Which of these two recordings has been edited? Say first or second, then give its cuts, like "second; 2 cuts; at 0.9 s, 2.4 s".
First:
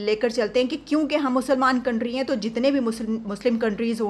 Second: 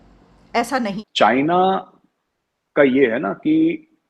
second; 1 cut; at 1.0 s